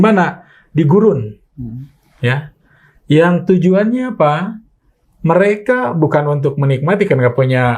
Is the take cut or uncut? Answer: uncut